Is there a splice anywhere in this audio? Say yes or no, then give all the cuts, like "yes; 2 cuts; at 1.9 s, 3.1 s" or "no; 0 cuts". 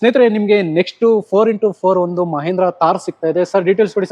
no; 0 cuts